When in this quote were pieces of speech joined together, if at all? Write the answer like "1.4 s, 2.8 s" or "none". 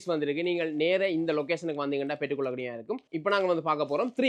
none

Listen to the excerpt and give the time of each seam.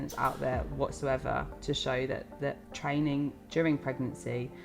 2.7 s

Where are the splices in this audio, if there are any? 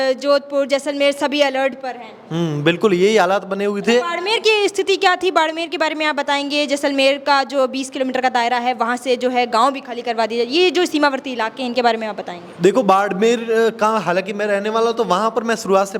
none

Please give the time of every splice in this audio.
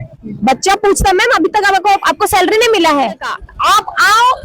3.4 s

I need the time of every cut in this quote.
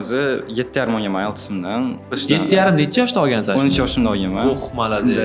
2.2 s

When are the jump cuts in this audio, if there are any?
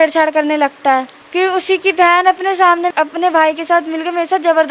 1.2 s, 2.9 s

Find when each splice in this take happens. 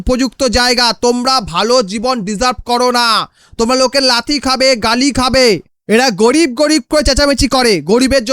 5.7 s

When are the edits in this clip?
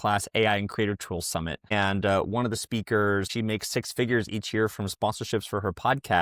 1.7 s, 3.3 s

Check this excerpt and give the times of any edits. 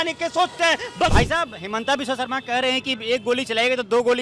1.1 s

